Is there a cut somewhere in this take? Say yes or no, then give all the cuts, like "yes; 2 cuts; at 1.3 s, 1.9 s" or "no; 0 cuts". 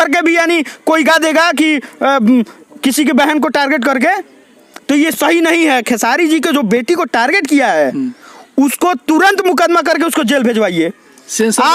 no; 0 cuts